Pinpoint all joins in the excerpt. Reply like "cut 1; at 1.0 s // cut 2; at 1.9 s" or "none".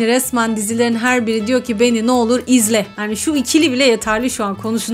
none